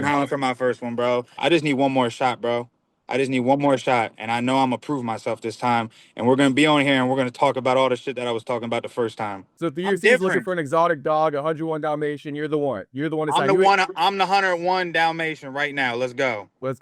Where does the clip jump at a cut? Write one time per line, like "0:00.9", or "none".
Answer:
0:01.3
0:09.4